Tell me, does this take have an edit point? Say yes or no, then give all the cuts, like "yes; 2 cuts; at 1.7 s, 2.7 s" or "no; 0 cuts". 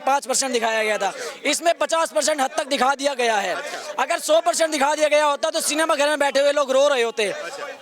no; 0 cuts